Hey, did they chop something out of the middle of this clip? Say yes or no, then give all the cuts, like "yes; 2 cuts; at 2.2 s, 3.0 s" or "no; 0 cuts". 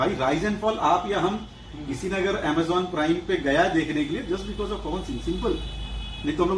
no; 0 cuts